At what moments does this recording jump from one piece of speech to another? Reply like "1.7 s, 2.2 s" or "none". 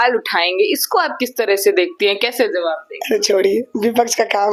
none